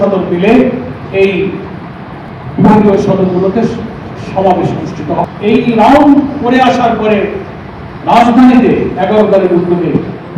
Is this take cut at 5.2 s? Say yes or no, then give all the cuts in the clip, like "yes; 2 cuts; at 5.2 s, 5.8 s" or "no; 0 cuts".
yes; 1 cut; at 5.2 s